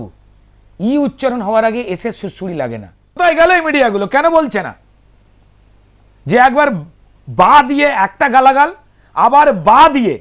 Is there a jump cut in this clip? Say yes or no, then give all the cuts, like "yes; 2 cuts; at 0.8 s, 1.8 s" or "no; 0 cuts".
yes; 1 cut; at 3.2 s